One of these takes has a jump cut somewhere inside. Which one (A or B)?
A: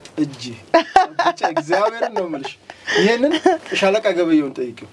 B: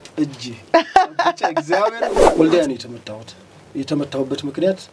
B